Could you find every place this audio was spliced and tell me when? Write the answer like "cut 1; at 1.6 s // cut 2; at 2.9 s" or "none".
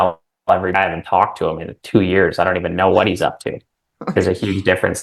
cut 1; at 0.7 s // cut 2; at 4.1 s